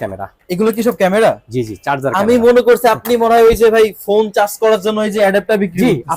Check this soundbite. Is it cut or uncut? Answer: uncut